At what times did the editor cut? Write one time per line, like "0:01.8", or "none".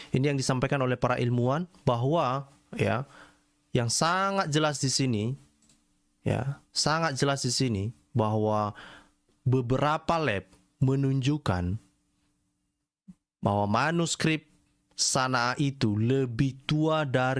none